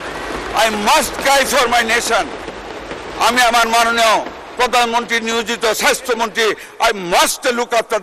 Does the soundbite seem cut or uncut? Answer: uncut